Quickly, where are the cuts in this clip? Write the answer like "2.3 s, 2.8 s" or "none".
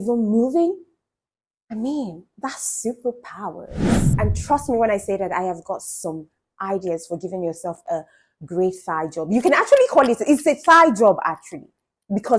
4.1 s